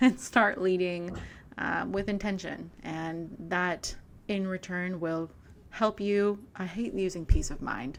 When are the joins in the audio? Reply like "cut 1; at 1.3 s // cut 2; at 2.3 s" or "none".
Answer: none